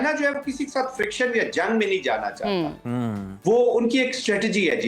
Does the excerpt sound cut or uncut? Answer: uncut